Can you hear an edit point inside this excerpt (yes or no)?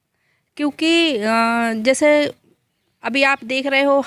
no